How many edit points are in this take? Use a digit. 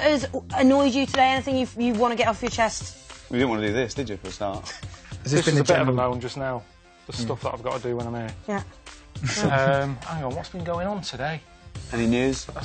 1